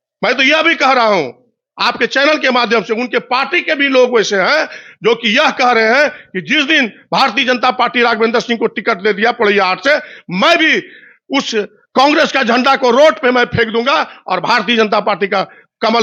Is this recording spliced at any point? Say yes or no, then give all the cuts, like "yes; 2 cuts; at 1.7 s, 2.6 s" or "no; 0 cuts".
no; 0 cuts